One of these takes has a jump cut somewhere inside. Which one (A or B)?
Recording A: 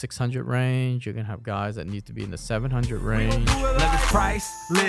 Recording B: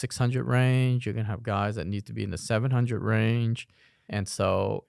A